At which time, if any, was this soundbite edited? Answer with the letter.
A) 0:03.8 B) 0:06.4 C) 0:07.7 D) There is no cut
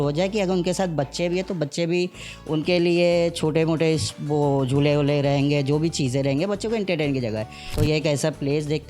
C